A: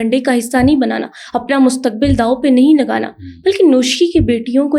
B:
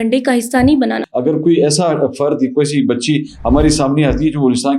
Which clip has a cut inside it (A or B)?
B